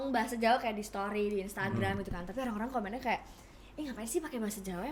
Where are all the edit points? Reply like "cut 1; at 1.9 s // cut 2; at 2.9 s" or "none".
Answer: none